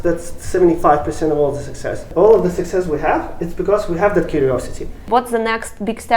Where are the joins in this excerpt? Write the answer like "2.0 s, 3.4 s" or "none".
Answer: 2.1 s, 5.0 s